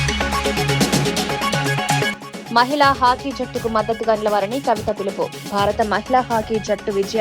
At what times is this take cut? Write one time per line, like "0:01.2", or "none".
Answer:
0:02.2